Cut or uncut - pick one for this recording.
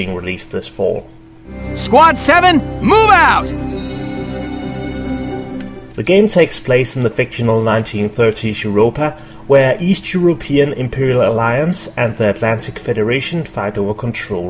uncut